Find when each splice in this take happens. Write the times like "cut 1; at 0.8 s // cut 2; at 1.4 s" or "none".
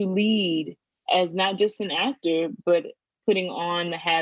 cut 1; at 1.0 s